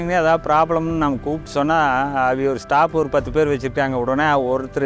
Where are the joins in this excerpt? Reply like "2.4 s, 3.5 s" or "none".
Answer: none